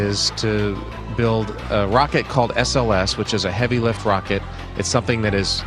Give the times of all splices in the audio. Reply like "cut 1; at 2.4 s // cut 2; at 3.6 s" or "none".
cut 1; at 4.6 s